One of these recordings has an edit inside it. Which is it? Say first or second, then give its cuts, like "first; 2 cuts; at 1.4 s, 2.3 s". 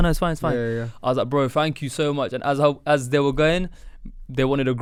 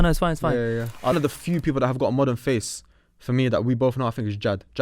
second; 1 cut; at 1.1 s